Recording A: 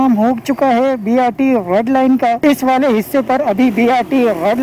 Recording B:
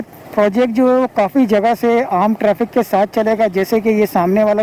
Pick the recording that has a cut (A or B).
A